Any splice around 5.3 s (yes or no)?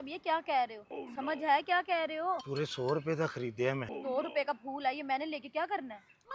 no